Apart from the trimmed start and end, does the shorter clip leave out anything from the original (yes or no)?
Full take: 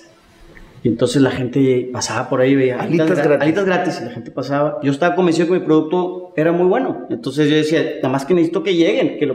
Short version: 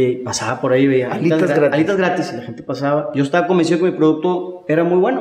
no